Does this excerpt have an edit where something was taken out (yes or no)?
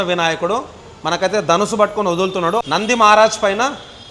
yes